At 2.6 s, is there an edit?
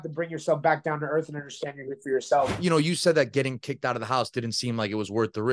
yes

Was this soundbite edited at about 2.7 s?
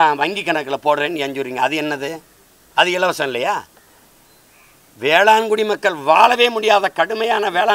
no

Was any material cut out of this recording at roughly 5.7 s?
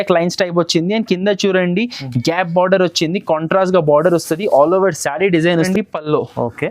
yes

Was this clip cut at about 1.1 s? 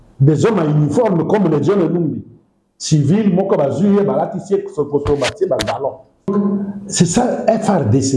no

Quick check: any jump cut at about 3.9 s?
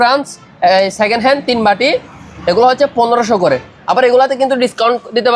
no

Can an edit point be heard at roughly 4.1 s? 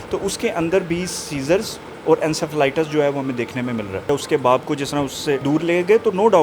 yes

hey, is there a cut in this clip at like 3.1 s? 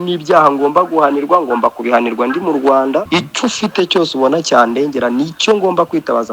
yes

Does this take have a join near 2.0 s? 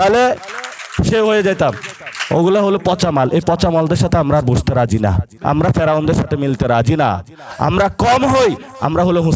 no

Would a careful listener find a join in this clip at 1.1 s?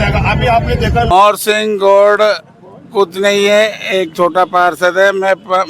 yes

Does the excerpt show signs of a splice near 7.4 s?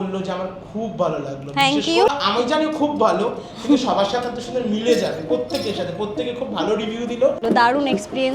yes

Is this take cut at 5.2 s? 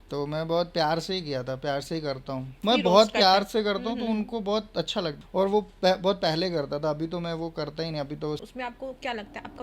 yes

